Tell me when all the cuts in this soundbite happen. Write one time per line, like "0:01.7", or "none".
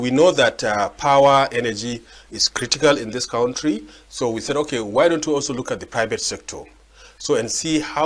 none